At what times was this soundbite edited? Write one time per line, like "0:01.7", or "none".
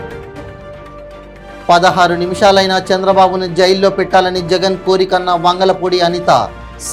0:01.6